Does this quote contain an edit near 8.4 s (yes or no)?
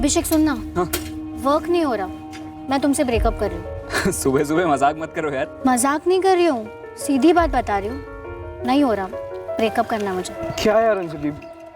no